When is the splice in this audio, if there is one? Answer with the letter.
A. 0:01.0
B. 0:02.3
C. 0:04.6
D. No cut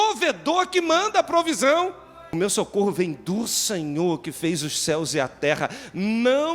B